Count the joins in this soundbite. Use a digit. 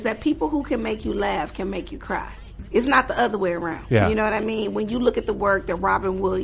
2